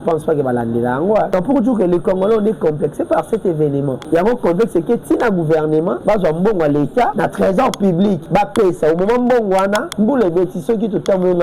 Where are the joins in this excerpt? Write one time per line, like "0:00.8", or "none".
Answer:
0:01.3
0:04.0
0:06.0
0:07.1
0:08.2
0:09.9